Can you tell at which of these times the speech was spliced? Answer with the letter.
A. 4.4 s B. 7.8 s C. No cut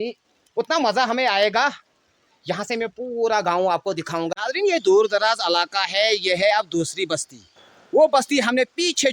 A